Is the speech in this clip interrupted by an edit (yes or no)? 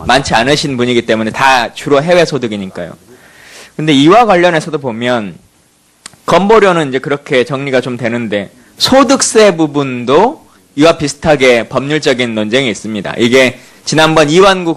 no